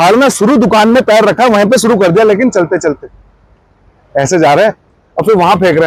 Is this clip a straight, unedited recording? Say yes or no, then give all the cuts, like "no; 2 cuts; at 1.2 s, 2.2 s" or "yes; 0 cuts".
yes; 0 cuts